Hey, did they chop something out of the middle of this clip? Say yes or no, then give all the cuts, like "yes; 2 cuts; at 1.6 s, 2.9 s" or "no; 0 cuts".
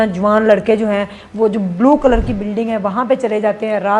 no; 0 cuts